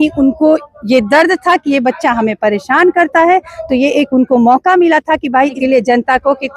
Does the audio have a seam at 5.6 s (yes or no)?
yes